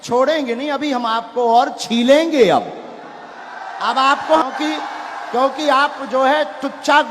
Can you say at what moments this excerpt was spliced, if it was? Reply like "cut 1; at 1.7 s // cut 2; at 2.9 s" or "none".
cut 1; at 4.4 s